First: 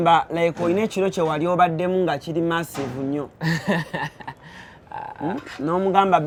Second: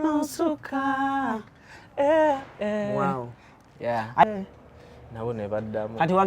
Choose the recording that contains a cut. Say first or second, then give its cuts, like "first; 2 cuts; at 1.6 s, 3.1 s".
second; 1 cut; at 4.2 s